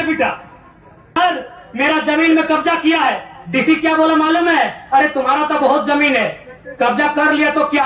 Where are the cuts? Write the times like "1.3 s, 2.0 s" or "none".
1.2 s